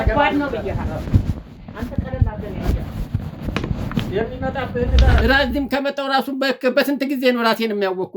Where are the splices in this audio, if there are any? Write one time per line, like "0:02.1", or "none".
0:05.2